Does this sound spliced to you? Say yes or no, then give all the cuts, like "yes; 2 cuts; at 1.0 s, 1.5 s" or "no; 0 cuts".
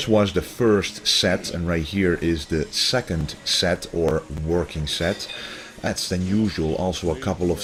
no; 0 cuts